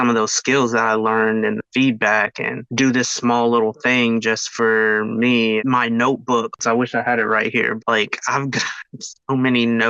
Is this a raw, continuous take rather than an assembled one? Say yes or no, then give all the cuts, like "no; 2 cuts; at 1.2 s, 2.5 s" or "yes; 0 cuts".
no; 2 cuts; at 6.6 s, 7.8 s